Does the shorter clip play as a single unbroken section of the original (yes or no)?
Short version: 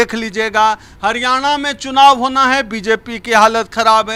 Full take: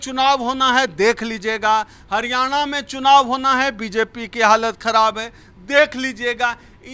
yes